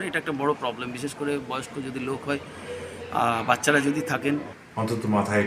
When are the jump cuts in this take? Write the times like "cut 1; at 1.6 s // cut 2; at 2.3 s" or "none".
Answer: cut 1; at 4.5 s